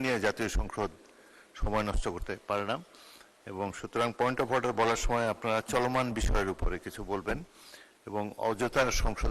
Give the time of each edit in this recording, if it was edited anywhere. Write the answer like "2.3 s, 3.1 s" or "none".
none